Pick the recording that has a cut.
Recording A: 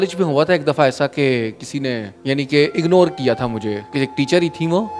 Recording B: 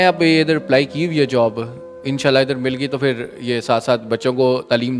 A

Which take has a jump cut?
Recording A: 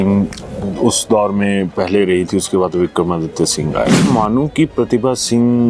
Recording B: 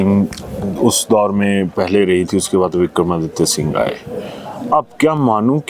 A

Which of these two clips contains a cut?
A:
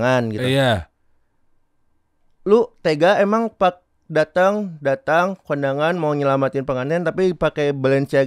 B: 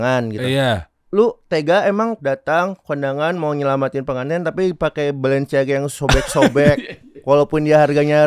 B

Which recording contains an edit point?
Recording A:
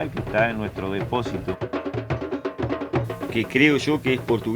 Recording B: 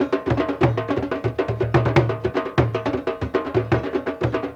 A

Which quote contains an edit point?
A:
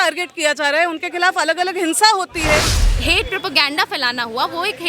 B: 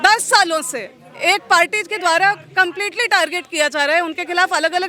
A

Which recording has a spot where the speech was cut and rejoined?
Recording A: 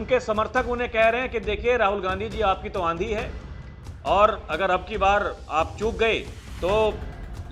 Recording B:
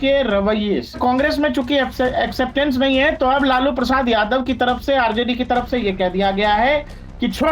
B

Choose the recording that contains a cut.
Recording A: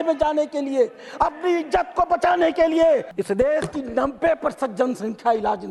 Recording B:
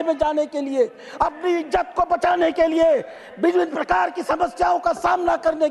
A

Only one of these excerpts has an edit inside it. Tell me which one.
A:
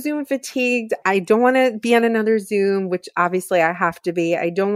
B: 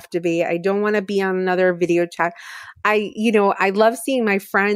A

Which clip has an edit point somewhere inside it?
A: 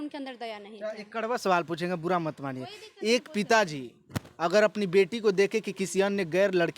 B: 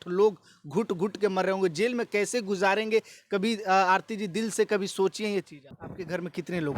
B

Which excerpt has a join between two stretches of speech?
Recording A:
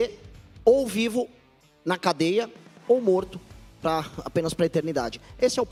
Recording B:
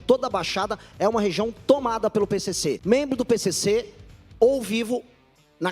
B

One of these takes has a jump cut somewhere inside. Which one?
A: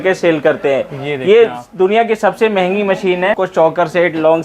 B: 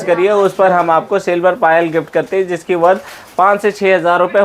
A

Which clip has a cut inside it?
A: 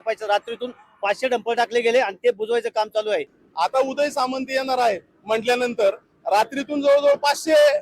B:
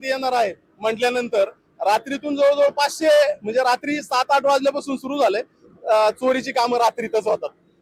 A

